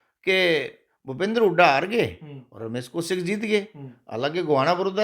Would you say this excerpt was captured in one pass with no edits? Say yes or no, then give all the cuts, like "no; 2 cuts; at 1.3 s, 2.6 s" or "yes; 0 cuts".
yes; 0 cuts